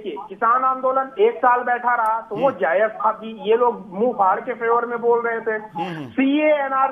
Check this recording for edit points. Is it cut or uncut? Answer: uncut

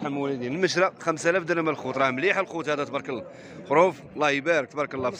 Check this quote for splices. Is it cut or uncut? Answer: uncut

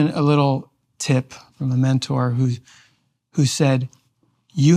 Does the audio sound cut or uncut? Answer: cut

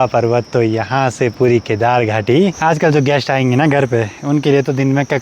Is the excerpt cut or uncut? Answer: cut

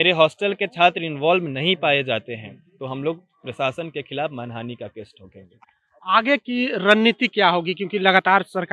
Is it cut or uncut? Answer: uncut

